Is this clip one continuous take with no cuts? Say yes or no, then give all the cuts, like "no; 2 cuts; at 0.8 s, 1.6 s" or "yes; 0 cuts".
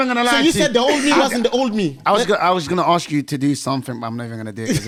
yes; 0 cuts